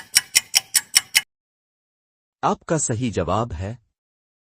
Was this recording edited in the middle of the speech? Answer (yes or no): yes